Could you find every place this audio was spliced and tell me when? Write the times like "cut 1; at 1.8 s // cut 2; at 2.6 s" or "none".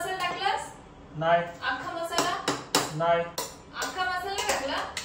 cut 1; at 3.4 s